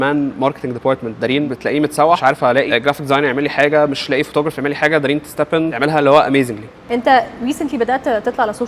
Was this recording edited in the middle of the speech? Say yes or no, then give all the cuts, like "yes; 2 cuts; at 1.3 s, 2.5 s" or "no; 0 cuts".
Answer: yes; 4 cuts; at 1.5 s, 2.3 s, 5.7 s, 6.9 s